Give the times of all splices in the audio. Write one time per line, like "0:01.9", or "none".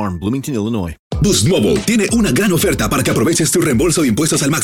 0:01.0